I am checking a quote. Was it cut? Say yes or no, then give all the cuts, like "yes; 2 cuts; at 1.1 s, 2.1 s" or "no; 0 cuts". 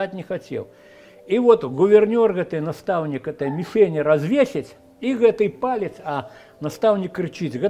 no; 0 cuts